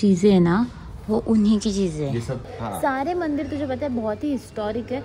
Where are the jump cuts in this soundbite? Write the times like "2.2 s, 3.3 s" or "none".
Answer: 2.4 s